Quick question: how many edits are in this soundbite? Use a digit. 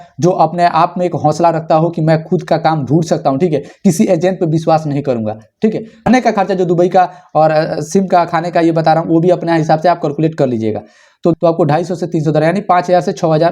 2